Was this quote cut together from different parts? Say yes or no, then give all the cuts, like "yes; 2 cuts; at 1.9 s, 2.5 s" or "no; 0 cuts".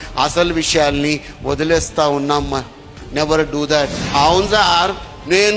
yes; 1 cut; at 4.0 s